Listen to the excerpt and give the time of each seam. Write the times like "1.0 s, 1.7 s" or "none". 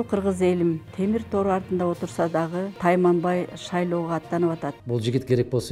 0.9 s, 2.7 s, 4.8 s